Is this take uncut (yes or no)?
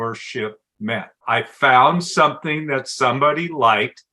no